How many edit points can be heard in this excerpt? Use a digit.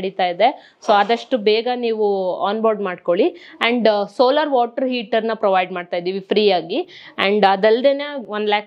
0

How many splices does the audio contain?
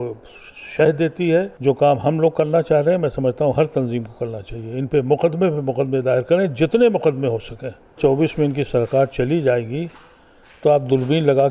2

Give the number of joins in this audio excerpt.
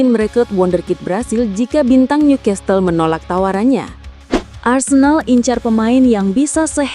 1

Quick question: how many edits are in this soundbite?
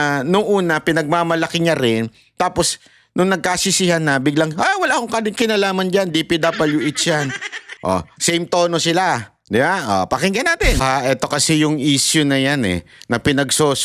1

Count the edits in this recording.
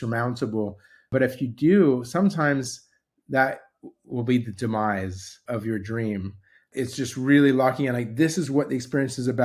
3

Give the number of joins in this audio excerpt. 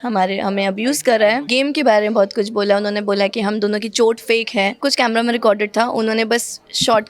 2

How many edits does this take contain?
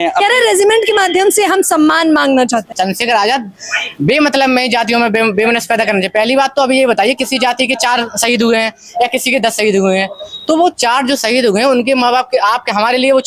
1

